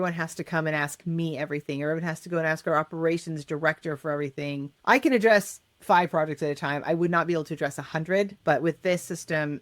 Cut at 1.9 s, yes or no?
no